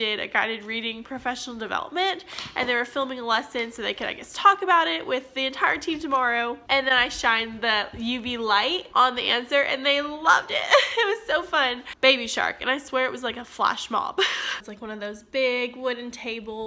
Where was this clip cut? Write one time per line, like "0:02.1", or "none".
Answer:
0:06.6
0:11.9
0:14.5